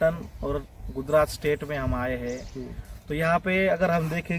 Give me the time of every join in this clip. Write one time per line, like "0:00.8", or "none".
none